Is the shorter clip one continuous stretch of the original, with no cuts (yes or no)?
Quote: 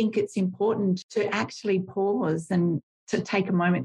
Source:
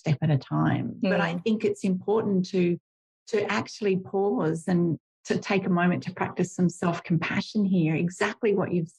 no